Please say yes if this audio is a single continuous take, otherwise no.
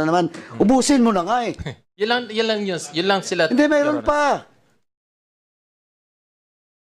yes